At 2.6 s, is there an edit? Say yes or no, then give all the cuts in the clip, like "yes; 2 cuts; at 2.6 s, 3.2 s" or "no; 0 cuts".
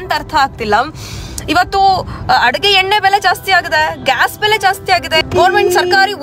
no; 1 cut; at 5.3 s